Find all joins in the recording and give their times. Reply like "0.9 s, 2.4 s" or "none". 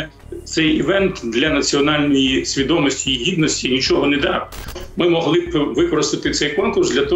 4.8 s